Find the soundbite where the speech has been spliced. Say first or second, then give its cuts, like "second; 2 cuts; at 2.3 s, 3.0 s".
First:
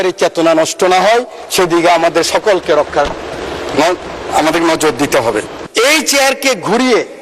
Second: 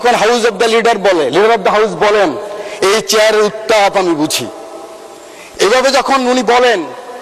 first; 1 cut; at 5.6 s